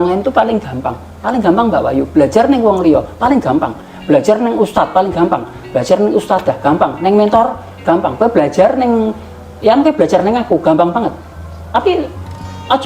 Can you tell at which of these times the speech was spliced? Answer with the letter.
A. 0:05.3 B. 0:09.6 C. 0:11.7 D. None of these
C